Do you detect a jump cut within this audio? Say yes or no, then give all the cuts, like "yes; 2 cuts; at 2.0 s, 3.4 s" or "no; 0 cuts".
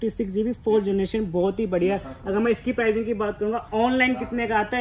no; 0 cuts